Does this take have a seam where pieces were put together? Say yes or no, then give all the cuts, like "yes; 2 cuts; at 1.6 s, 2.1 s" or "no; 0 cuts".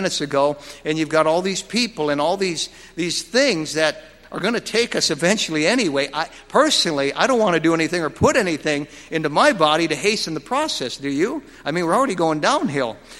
no; 0 cuts